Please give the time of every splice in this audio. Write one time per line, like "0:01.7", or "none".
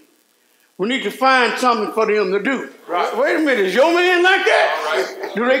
0:03.1